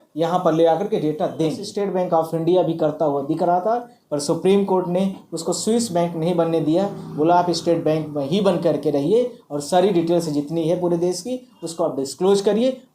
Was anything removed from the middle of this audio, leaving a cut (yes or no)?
yes